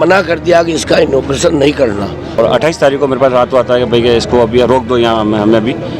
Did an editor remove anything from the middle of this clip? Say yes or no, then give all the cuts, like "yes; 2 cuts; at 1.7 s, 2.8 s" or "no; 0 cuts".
yes; 1 cut; at 2.3 s